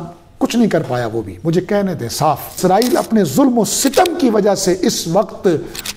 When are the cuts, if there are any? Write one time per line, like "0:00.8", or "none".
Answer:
0:02.5